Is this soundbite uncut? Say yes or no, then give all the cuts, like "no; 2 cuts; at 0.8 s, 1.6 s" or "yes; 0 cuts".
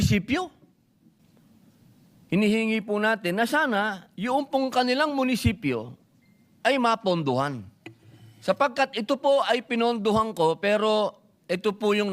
no; 1 cut; at 1.2 s